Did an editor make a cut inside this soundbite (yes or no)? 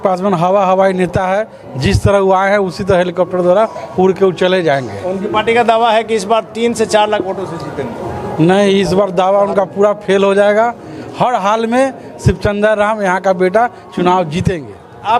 no